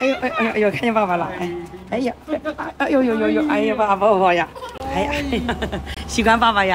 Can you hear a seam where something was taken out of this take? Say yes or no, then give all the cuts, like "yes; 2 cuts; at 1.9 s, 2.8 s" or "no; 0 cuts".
no; 0 cuts